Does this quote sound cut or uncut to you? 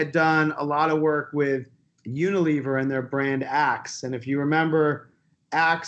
uncut